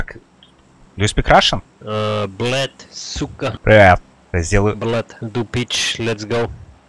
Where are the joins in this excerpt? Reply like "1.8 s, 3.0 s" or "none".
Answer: 1.7 s, 3.6 s, 4.2 s, 5.2 s